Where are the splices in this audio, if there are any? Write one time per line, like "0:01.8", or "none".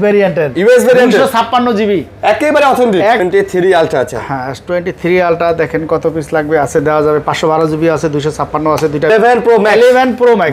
0:03.2
0:09.1